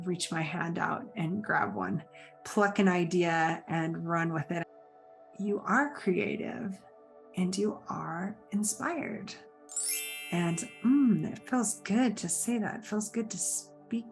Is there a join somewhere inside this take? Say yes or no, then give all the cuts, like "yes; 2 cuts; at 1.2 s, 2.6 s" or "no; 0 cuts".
yes; 1 cut; at 4.6 s